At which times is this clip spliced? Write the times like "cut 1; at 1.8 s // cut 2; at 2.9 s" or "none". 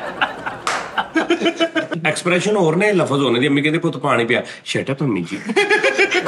cut 1; at 1.9 s